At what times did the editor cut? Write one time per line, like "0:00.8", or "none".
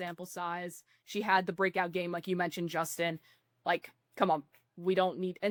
none